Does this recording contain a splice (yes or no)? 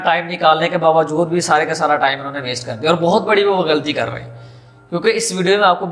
no